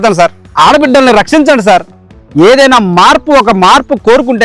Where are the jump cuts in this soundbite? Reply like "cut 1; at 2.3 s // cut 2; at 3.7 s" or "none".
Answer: cut 1; at 2.2 s